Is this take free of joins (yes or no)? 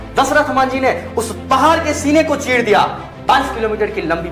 yes